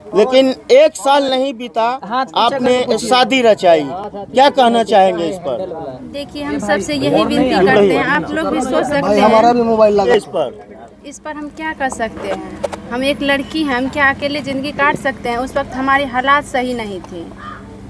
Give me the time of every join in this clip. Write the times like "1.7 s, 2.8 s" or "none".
10.1 s